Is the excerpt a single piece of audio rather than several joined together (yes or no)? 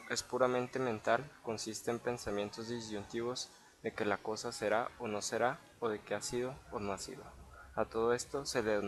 yes